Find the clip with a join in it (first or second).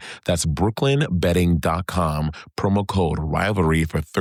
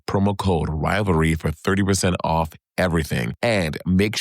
second